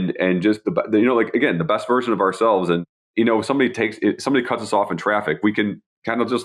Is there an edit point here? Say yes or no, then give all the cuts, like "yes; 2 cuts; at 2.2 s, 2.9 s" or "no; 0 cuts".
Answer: yes; 1 cut; at 3.0 s